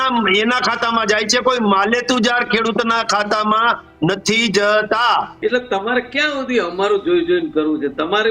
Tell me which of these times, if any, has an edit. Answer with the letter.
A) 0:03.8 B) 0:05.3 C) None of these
B